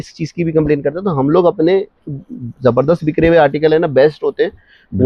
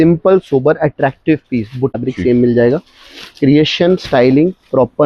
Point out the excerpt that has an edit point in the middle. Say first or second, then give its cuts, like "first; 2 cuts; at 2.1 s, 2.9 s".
second; 1 cut; at 2.0 s